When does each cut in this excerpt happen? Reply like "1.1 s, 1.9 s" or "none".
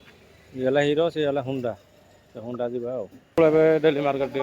3.4 s